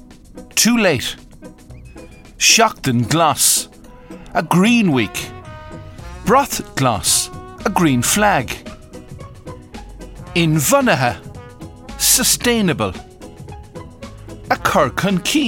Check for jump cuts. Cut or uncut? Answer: uncut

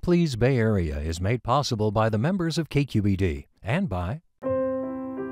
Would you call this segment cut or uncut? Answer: cut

